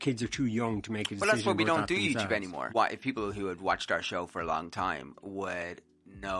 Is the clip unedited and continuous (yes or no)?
no